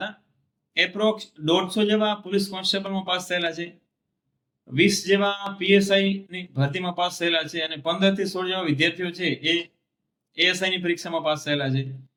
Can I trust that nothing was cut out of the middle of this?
yes; 0 cuts

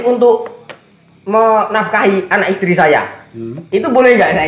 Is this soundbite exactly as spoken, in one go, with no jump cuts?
yes; 0 cuts

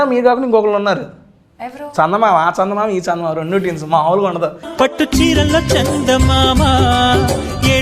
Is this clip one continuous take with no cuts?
yes; 0 cuts

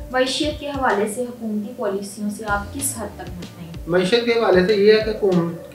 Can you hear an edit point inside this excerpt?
no; 0 cuts

